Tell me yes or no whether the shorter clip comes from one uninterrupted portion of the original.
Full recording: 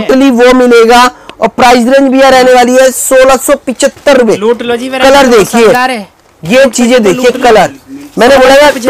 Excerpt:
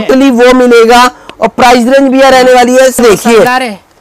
no